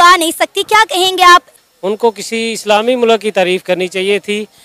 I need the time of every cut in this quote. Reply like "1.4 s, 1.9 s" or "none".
1.6 s